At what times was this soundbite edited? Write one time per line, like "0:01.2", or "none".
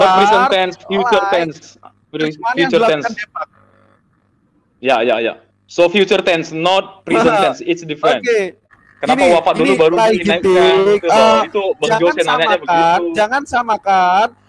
0:08.6